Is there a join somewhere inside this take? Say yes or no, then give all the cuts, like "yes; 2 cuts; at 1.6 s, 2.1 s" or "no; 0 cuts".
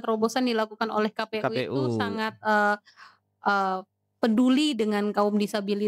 no; 0 cuts